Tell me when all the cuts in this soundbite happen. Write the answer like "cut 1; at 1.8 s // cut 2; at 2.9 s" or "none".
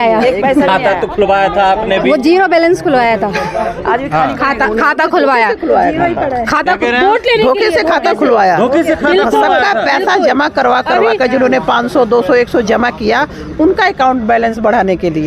none